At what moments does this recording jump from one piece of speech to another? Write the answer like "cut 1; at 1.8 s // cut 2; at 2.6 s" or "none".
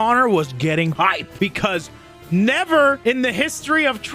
cut 1; at 0.9 s